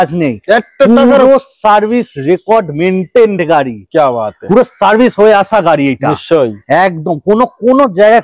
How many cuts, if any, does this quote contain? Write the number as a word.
zero